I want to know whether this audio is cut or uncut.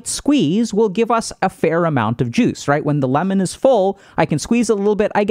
uncut